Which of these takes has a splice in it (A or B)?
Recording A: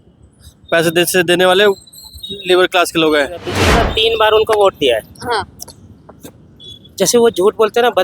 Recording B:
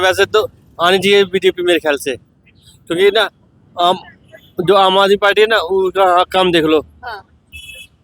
A